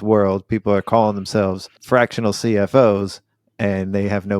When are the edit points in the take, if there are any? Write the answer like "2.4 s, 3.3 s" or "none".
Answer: 1.7 s